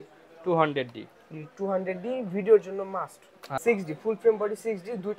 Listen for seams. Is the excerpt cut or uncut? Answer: cut